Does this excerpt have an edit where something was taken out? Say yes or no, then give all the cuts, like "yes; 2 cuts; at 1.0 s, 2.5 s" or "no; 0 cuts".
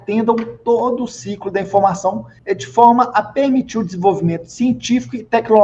no; 0 cuts